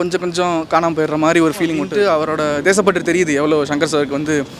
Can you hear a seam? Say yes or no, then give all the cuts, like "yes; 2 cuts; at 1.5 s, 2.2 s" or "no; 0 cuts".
yes; 1 cut; at 1.9 s